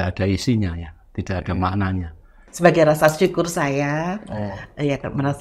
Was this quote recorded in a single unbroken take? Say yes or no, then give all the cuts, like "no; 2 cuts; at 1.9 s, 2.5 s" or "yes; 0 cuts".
no; 1 cut; at 2.4 s